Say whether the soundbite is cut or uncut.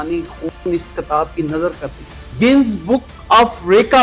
cut